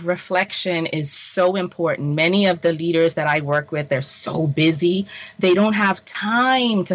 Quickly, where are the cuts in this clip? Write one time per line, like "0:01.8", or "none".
none